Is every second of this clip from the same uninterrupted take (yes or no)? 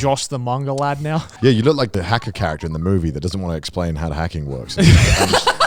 no